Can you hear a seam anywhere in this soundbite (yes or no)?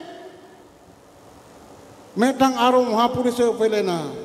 no